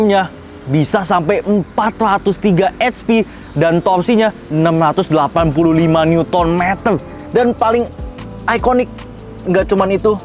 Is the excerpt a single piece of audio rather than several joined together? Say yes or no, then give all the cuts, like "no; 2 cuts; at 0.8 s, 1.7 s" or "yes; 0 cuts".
no; 1 cut; at 7.1 s